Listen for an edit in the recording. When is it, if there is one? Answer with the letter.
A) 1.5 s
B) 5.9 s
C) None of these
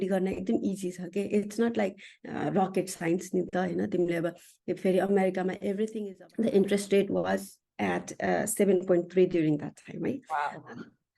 B